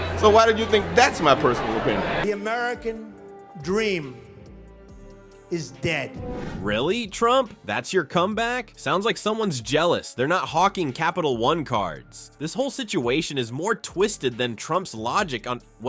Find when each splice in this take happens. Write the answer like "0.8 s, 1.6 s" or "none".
none